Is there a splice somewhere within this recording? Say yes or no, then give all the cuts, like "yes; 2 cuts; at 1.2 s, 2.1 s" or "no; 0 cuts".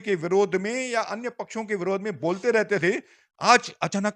no; 0 cuts